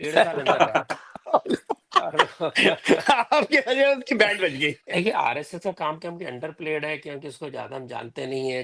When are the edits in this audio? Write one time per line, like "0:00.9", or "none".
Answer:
0:04.8